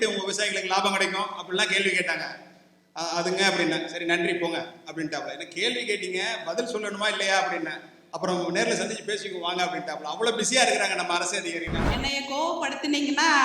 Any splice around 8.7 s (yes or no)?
no